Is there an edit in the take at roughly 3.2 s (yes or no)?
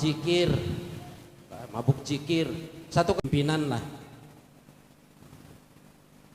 yes